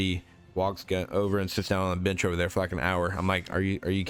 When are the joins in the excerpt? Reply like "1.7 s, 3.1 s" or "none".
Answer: none